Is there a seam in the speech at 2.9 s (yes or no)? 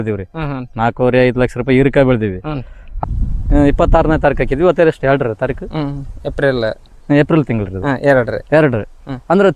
yes